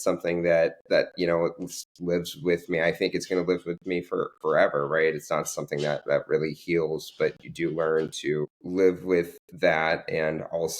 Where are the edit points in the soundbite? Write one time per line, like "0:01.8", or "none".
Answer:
0:08.6